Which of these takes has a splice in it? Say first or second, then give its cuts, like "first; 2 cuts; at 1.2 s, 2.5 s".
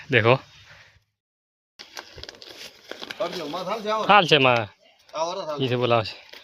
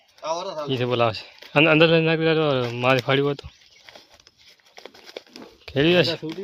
first; 1 cut; at 1.2 s